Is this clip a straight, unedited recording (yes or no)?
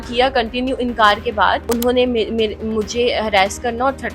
no